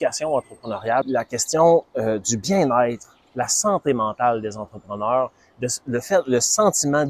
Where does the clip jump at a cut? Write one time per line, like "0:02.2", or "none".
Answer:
0:01.0